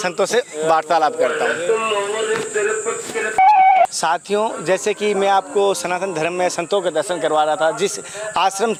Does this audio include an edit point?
no; 0 cuts

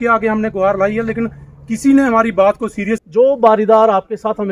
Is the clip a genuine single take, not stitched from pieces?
no; 1 cut; at 3.0 s

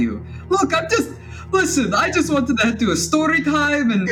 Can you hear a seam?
no; 0 cuts

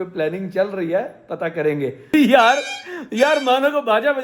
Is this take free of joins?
no; 1 cut; at 2.0 s

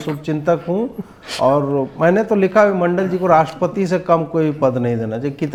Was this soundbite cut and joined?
no; 0 cuts

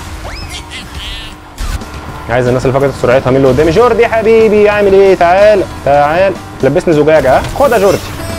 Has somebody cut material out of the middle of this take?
yes; 3 cuts; at 1.8 s, 6.5 s, 7.5 s

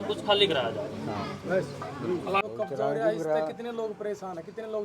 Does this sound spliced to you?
yes; 1 cut; at 2.5 s

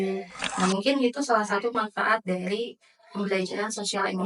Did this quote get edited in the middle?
no; 0 cuts

